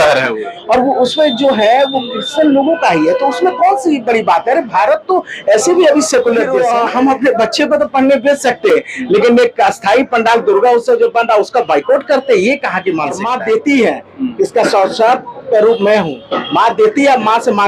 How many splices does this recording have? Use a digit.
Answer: 2